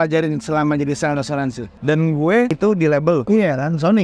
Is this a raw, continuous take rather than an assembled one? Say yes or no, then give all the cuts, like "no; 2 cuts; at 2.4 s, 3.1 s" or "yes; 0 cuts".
no; 2 cuts; at 1.7 s, 2.8 s